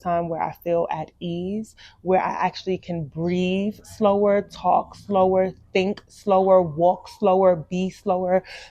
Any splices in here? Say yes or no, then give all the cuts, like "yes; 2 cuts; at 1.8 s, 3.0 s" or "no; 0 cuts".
no; 0 cuts